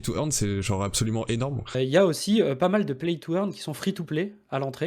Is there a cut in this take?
yes; 1 cut; at 1.7 s

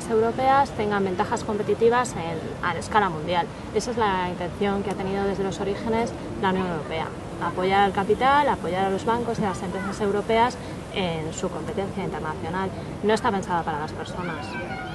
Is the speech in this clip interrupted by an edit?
no; 0 cuts

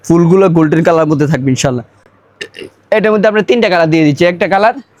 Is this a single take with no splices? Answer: yes; 0 cuts

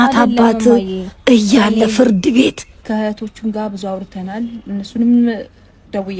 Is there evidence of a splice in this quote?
yes; 1 cut; at 2.8 s

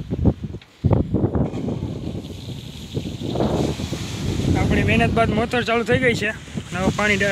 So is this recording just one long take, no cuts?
yes; 0 cuts

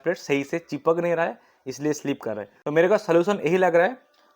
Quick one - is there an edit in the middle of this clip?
no; 0 cuts

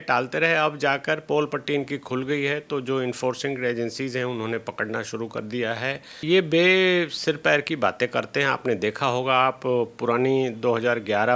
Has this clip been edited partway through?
yes; 1 cut; at 6.1 s

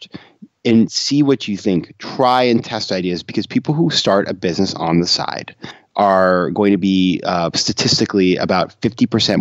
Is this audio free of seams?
no; 1 cut; at 5.8 s

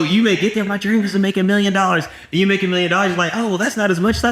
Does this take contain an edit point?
no; 0 cuts

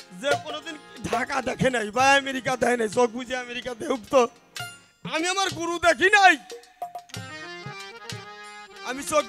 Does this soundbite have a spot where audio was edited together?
no; 0 cuts

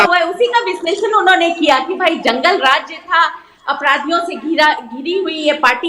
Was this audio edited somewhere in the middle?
no; 0 cuts

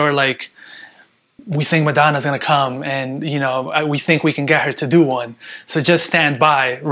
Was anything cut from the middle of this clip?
no; 0 cuts

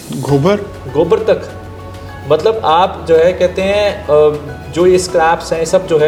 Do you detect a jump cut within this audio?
no; 0 cuts

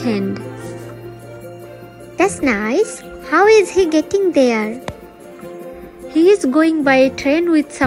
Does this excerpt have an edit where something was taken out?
yes; 1 cut; at 1.2 s

